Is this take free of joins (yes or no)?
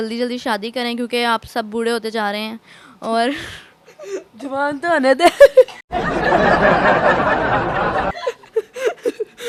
yes